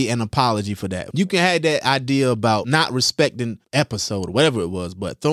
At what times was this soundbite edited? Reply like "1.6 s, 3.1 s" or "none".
1.0 s, 2.7 s, 3.6 s